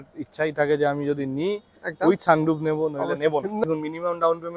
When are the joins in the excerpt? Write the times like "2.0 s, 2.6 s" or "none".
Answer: 3.6 s